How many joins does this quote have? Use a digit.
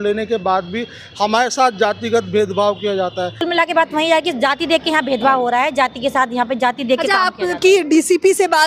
1